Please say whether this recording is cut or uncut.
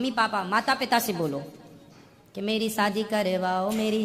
uncut